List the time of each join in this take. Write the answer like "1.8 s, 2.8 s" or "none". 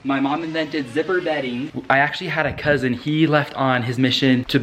1.7 s